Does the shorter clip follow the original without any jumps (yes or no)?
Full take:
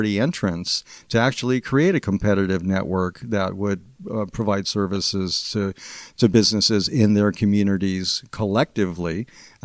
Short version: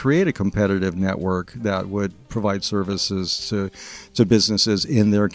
no